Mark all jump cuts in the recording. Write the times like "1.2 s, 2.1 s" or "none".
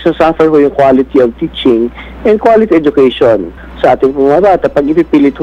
none